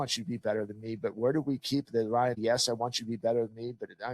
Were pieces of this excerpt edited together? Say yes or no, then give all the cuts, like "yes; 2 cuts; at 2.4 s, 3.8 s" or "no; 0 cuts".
yes; 1 cut; at 2.4 s